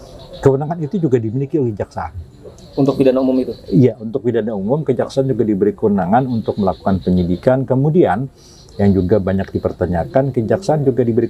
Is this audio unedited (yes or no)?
yes